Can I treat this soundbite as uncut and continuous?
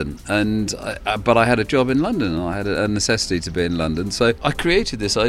no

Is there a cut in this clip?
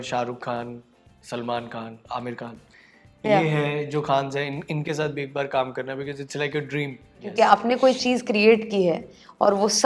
yes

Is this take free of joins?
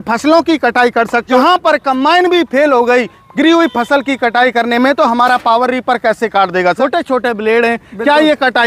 no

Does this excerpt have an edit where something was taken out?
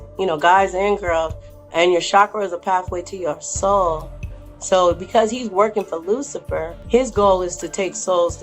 yes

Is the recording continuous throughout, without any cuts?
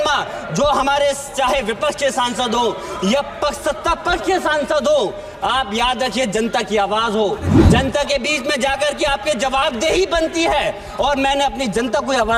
yes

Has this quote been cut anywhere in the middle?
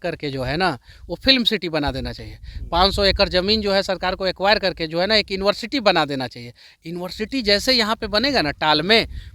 no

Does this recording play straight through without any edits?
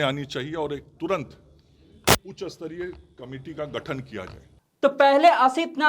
no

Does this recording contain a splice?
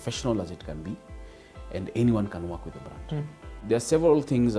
yes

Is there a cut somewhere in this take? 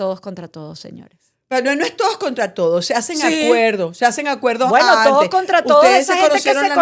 no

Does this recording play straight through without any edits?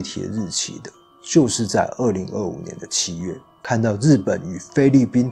no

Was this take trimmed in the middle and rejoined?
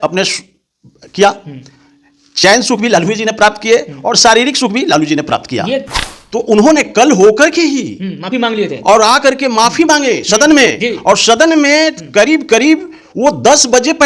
yes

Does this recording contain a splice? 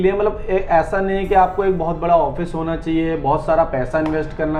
no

